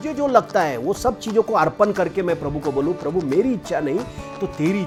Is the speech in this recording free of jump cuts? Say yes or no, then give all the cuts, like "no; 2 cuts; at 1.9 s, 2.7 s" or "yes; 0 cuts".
yes; 0 cuts